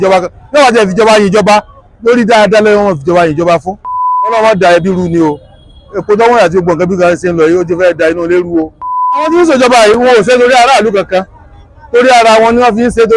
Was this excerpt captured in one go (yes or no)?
no